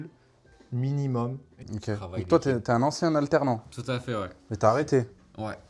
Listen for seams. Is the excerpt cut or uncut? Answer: cut